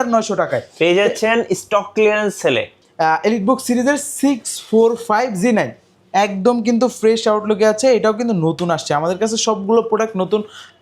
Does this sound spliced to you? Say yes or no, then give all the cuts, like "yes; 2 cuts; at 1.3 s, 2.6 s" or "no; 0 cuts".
yes; 1 cut; at 2.8 s